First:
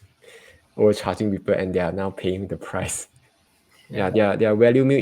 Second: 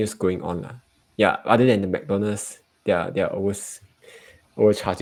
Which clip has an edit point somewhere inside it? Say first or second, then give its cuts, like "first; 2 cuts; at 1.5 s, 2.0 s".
first; 1 cut; at 3.2 s